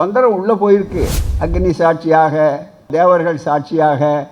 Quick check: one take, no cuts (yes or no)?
no